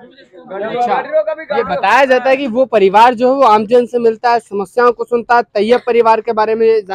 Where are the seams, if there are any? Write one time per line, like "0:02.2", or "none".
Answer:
none

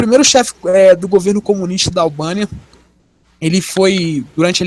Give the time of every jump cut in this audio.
none

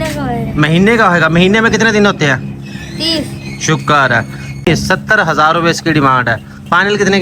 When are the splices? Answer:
0:04.7

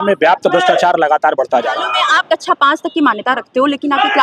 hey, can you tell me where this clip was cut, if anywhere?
0:01.9

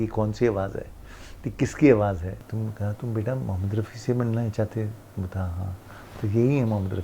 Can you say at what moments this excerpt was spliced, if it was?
0:02.3

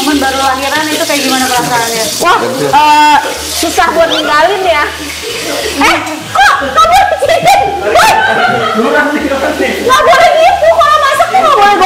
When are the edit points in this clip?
none

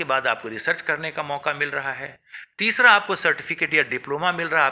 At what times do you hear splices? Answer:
none

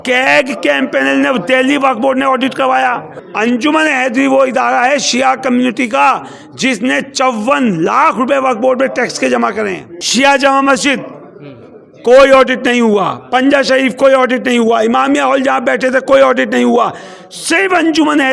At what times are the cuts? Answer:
0:03.2
0:09.9

